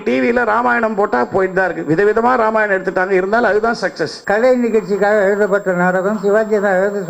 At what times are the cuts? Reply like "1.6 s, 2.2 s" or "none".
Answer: 4.1 s